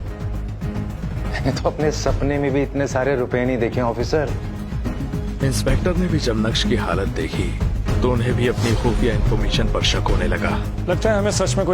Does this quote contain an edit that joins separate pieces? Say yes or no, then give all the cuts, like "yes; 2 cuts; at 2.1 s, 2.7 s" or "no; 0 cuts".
yes; 2 cuts; at 1.2 s, 4.6 s